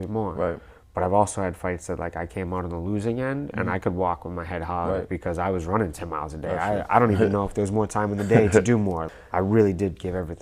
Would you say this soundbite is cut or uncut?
cut